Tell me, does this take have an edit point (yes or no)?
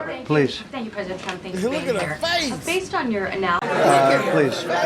yes